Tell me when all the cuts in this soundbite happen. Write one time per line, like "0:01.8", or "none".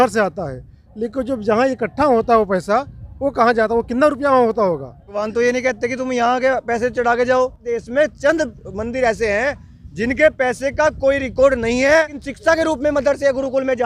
0:05.2
0:07.7
0:12.2